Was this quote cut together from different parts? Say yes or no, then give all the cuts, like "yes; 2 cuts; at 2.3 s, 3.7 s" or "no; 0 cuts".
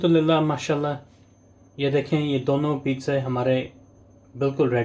no; 0 cuts